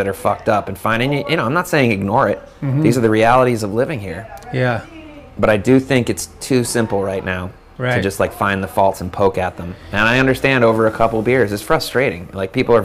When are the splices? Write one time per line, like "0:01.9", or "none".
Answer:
none